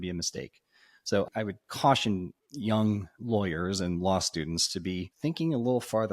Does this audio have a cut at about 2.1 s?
no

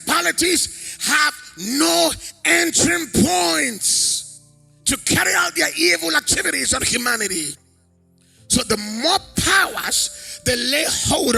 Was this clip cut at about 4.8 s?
no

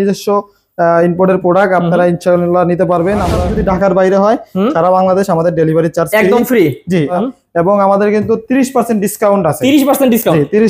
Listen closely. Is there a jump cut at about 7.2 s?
yes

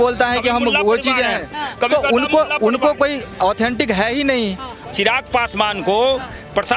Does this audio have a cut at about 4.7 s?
yes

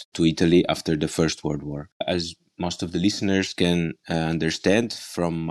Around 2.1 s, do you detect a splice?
yes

